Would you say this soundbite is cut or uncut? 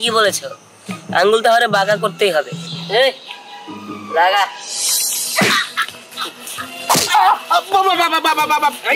uncut